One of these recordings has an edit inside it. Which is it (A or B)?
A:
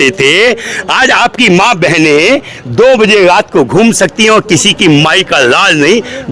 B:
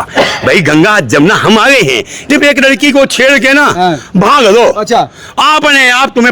B